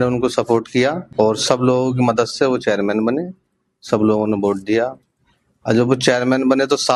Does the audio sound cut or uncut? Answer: cut